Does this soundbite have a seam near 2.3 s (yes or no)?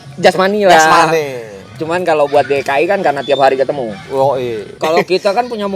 no